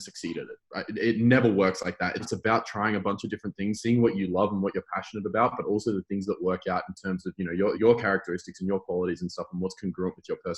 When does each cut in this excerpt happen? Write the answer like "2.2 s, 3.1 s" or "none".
2.2 s, 7.8 s